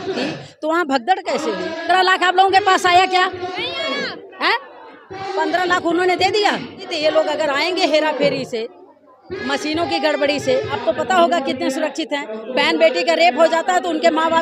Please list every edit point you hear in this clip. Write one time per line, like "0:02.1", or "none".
0:01.8
0:06.9
0:10.8